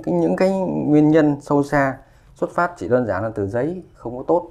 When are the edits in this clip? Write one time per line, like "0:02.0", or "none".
none